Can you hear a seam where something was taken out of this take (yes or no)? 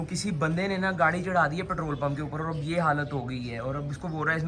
no